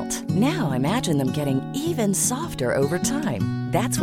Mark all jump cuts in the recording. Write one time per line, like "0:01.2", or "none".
none